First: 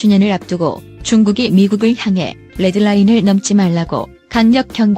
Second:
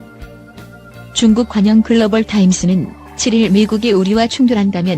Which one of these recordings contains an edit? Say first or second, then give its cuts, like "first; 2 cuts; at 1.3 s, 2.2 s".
second; 1 cut; at 1.2 s